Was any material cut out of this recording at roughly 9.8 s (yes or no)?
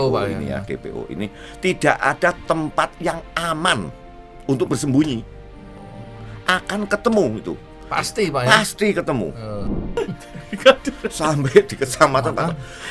yes